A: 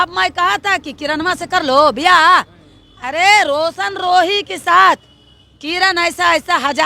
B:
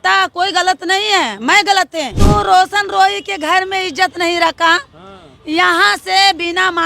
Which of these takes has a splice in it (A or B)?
B